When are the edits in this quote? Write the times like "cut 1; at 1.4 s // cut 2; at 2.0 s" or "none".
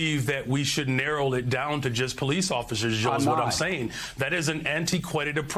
none